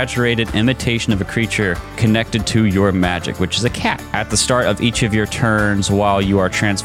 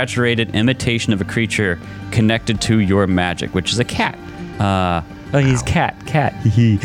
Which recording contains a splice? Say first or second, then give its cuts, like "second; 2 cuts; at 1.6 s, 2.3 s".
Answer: first; 2 cuts; at 1.9 s, 4.0 s